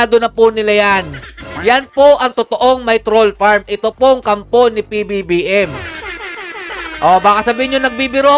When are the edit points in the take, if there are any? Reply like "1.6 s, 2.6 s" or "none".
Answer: none